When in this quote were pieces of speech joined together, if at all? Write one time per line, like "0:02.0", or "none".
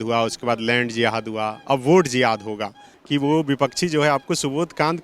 0:02.9